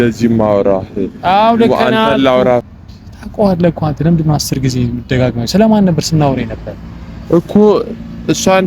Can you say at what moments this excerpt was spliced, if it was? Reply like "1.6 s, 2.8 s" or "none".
2.6 s